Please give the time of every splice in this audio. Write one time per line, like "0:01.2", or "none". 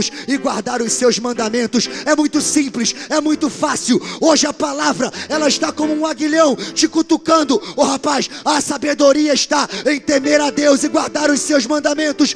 none